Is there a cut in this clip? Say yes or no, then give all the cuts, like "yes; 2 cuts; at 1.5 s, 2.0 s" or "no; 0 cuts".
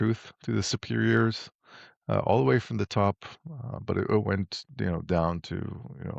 no; 0 cuts